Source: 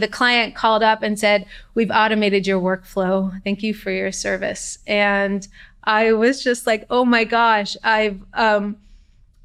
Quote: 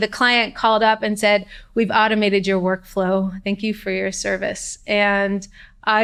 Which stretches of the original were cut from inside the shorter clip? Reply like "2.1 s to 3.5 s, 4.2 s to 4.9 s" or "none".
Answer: none